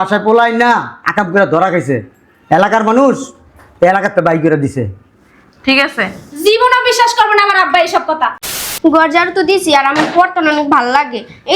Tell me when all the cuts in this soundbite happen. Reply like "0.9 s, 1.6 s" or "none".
8.4 s